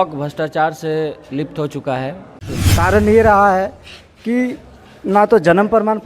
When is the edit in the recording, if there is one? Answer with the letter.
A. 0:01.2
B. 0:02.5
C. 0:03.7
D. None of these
B